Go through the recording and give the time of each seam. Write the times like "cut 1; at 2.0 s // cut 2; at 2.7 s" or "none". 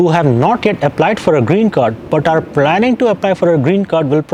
none